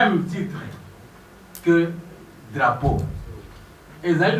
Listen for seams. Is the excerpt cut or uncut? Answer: uncut